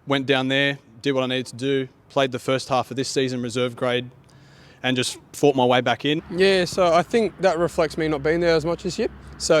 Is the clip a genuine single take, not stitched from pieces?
no; 1 cut; at 6.2 s

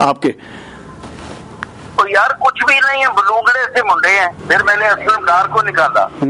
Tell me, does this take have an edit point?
yes; 1 cut; at 4.4 s

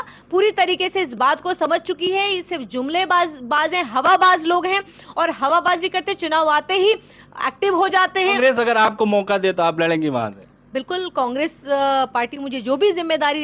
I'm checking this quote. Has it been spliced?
yes; 1 cut; at 8.3 s

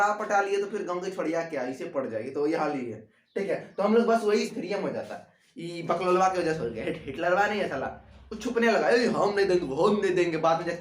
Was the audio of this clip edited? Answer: yes; 1 cut; at 4.5 s

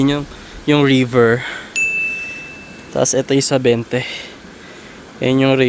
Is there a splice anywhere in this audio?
no; 0 cuts

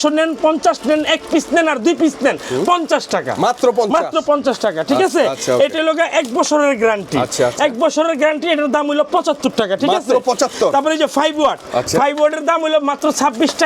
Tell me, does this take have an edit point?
no; 0 cuts

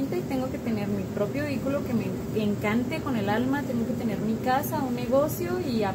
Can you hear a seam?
no; 0 cuts

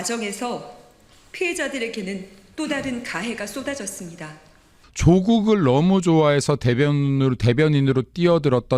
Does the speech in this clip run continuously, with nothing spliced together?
no; 1 cut; at 4.9 s

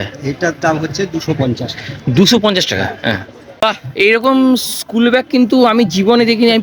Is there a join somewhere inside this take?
yes; 1 cut; at 3.6 s

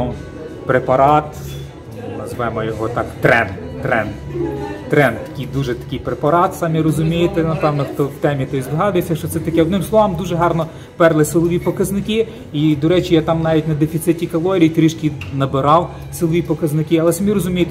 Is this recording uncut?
yes; 0 cuts

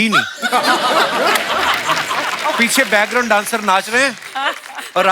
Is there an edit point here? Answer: no; 0 cuts

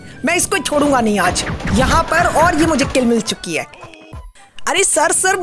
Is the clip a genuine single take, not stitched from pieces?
no; 1 cut; at 4.1 s

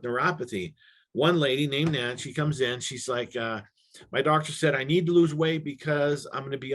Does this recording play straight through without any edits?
yes; 0 cuts

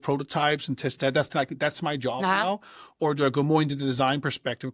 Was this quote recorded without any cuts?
yes; 0 cuts

